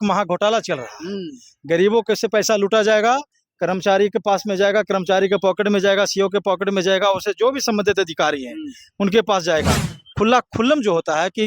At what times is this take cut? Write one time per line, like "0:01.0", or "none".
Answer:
0:09.9